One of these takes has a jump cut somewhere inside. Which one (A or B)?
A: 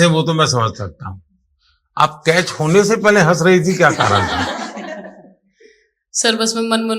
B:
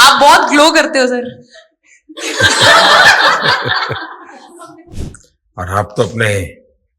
B